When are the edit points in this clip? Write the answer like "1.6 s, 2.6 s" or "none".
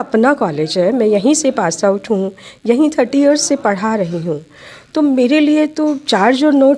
none